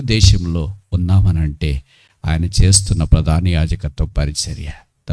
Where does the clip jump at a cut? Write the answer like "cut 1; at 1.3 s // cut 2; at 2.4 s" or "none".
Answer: none